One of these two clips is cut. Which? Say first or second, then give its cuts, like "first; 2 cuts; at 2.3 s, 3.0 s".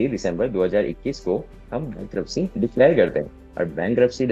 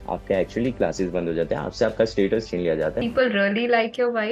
second; 1 cut; at 3.0 s